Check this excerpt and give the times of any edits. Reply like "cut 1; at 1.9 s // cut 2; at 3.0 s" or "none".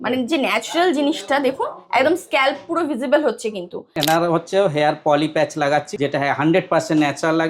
cut 1; at 3.9 s // cut 2; at 5.9 s